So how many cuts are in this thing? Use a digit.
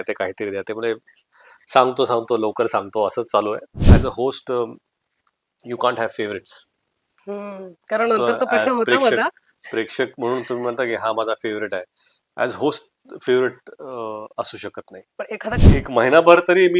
2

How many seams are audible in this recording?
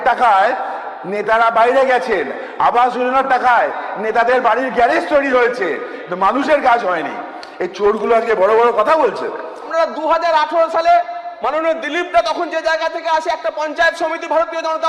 1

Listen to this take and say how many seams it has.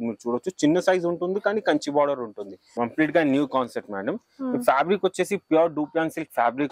1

